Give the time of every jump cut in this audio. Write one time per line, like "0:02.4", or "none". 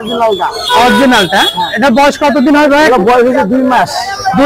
none

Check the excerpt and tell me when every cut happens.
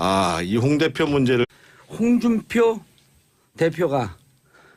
none

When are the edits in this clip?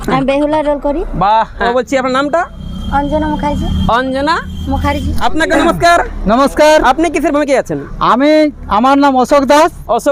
none

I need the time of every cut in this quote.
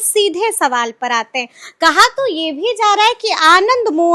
none

